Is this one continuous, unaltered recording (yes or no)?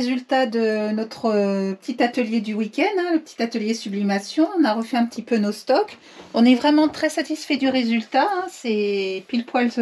yes